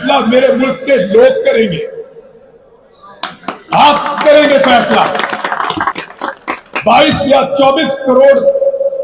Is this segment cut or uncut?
cut